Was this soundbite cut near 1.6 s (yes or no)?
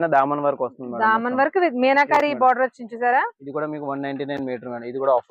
no